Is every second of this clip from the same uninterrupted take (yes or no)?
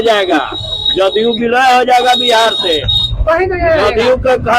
yes